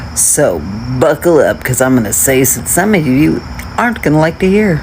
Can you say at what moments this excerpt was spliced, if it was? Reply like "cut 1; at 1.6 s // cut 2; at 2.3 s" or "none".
cut 1; at 2.6 s